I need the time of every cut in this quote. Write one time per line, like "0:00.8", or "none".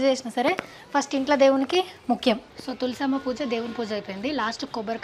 0:02.5